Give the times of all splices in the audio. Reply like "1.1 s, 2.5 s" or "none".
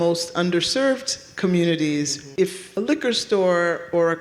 2.3 s